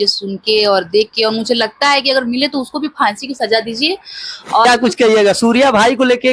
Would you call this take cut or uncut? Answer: cut